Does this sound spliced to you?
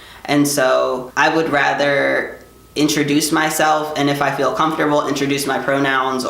yes; 1 cut; at 1.0 s

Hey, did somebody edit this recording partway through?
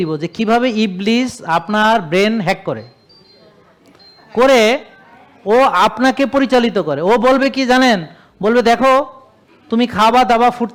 no; 0 cuts

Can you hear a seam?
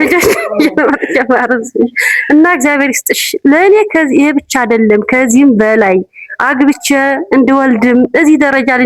no; 0 cuts

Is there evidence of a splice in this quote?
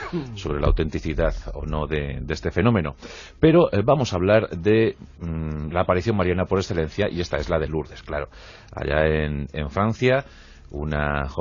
no; 0 cuts

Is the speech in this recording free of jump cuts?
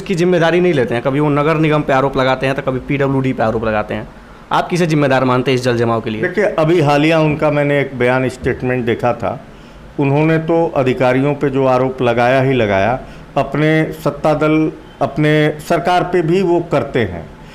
yes; 0 cuts

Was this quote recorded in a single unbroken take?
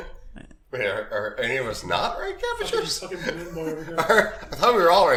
yes; 0 cuts

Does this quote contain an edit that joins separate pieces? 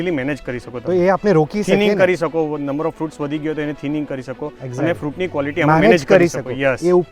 no; 0 cuts

